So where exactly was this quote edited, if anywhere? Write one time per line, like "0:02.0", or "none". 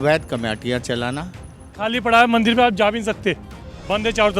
0:01.6